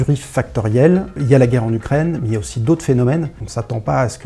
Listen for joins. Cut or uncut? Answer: cut